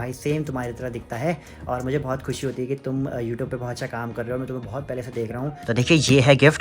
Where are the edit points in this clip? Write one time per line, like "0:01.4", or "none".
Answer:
0:05.6